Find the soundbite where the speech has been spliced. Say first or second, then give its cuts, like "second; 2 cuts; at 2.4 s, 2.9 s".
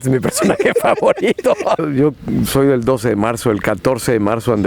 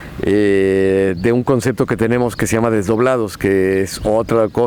first; 1 cut; at 1.8 s